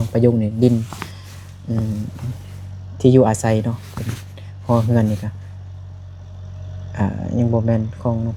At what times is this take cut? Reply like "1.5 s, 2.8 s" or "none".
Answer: none